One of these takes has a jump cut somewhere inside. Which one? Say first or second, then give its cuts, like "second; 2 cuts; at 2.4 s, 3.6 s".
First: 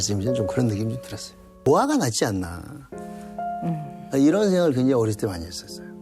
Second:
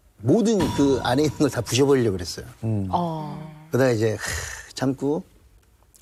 first; 1 cut; at 1.6 s